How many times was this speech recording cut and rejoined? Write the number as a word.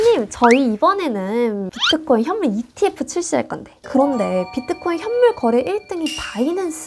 one